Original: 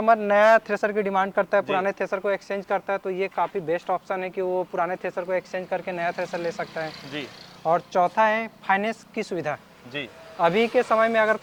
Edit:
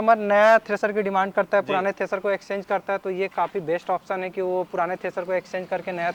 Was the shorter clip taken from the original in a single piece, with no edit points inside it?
yes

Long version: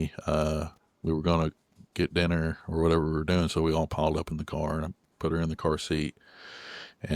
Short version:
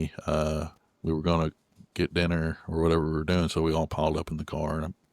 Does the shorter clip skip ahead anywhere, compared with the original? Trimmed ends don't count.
no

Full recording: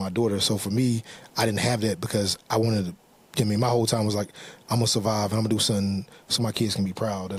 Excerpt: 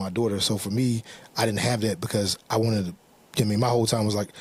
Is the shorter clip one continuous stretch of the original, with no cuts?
yes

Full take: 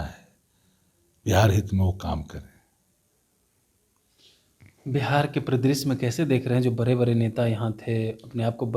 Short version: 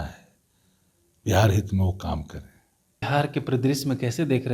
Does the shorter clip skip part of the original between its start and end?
yes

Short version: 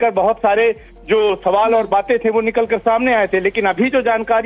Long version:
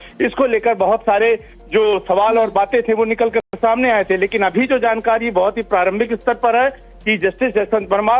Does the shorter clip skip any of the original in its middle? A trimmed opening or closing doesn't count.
yes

